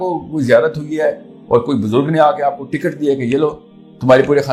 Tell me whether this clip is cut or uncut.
uncut